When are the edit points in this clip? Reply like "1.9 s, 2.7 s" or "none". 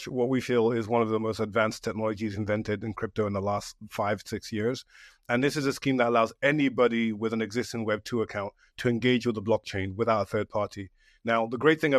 none